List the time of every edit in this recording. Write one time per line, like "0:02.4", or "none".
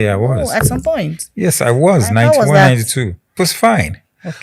0:03.3